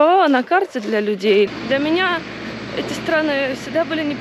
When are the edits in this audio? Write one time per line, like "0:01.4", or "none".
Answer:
0:01.5